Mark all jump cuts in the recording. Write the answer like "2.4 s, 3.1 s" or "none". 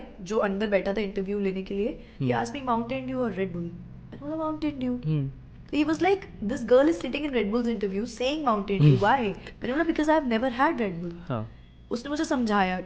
2.1 s